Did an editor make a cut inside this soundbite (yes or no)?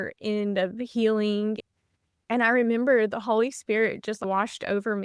yes